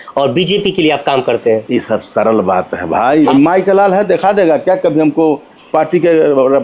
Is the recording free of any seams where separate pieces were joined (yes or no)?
no